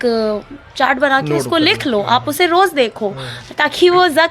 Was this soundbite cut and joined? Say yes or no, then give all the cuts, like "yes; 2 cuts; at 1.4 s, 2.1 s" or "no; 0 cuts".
no; 0 cuts